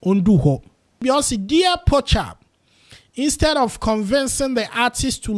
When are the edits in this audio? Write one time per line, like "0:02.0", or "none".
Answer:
0:01.0